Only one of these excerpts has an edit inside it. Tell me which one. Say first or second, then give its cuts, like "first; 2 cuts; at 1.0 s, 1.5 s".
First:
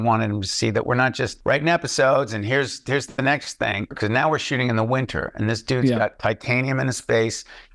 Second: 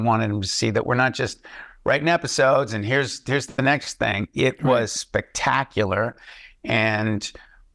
first; 2 cuts; at 1.3 s, 3.9 s